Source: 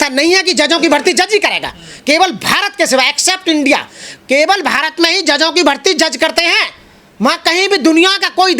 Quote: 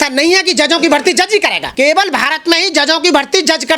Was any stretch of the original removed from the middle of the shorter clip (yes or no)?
yes